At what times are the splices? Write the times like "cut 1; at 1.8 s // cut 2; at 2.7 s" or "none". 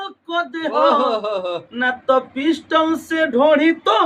none